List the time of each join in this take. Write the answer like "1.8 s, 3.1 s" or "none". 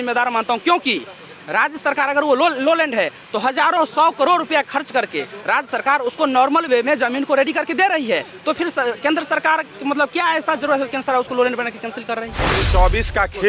12.6 s